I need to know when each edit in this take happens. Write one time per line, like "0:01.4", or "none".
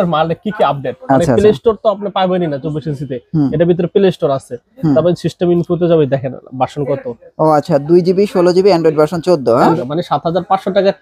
0:09.8